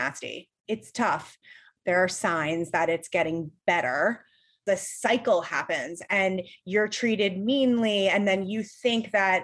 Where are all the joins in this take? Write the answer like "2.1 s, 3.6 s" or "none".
1.4 s, 4.6 s